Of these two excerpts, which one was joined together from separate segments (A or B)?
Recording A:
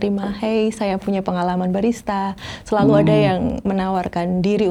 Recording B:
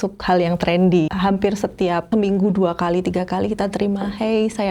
B